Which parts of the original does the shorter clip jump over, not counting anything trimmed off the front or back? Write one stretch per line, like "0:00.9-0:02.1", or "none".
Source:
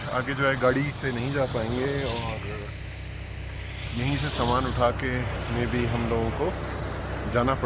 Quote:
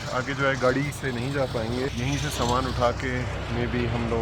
0:01.9-0:03.9